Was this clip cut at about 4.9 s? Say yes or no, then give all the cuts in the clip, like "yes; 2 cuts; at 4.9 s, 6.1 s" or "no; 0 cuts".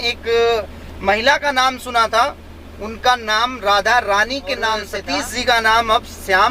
yes; 1 cut; at 4.9 s